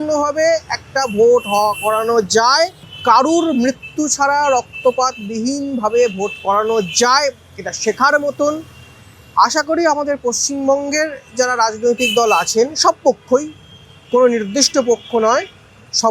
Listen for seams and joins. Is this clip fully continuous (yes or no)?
yes